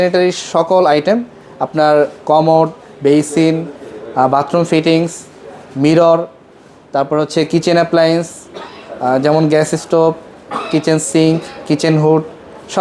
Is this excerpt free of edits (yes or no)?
yes